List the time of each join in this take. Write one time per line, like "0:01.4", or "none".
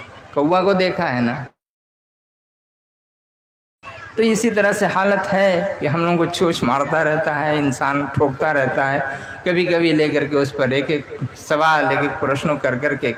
none